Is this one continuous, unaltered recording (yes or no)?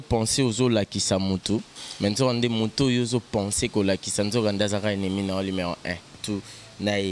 no